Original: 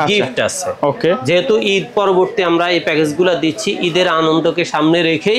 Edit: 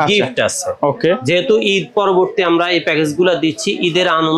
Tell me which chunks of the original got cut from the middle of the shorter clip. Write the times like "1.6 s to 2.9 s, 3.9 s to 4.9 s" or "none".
none